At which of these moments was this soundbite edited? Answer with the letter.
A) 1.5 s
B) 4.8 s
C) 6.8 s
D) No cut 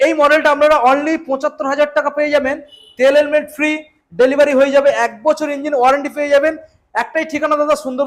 D